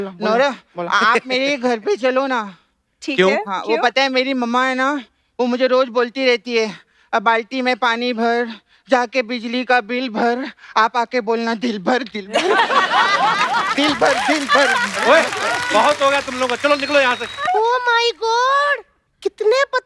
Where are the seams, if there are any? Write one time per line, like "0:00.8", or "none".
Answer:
0:17.4